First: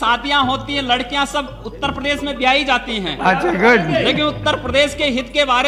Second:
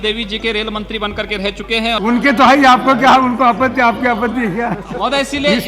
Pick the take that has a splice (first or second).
second